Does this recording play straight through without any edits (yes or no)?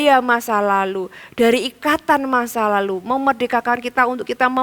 yes